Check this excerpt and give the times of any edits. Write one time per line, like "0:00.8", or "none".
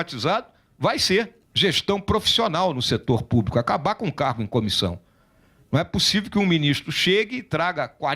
0:01.4